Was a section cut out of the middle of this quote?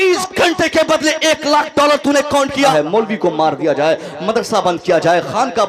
yes; 1 cut; at 2.7 s

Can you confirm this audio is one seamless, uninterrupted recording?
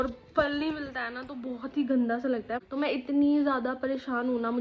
no; 1 cut; at 2.5 s

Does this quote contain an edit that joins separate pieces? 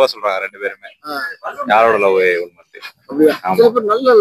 no; 0 cuts

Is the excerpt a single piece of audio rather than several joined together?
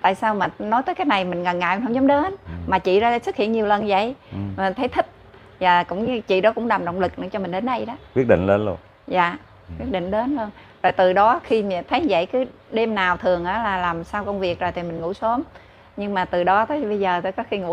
yes; 0 cuts

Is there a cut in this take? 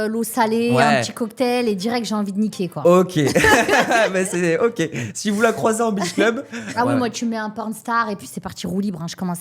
yes; 1 cut; at 6.7 s

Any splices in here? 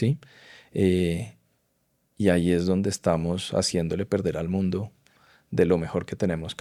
no; 0 cuts

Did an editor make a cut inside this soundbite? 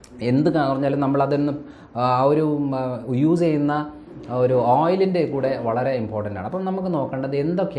no; 0 cuts

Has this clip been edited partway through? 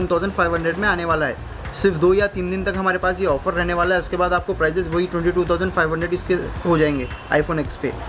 no; 0 cuts

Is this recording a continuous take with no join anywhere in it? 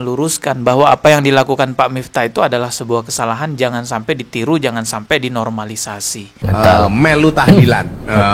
no; 1 cut; at 6.3 s

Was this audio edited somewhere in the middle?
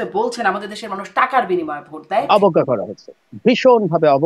yes; 1 cut; at 2.2 s

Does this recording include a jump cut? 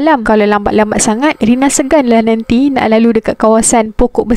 no; 0 cuts

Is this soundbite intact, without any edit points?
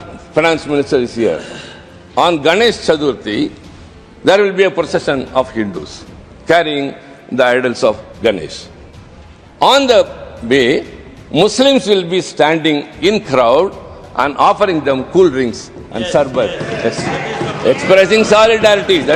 yes; 0 cuts

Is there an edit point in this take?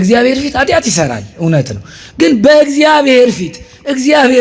no; 0 cuts

